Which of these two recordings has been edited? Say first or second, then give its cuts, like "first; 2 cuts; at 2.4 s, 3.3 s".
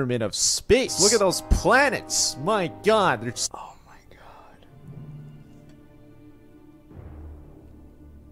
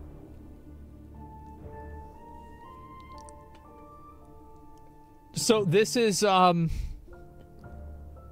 first; 2 cuts; at 0.9 s, 3.5 s